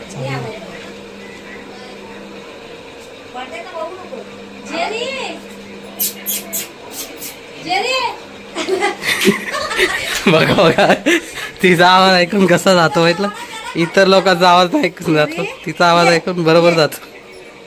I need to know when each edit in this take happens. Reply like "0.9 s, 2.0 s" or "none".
none